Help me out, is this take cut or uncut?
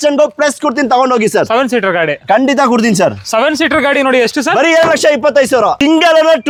uncut